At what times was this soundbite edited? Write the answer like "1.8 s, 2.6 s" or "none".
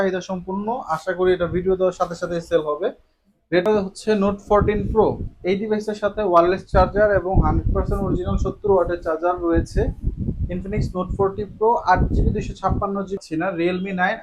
3.7 s, 13.2 s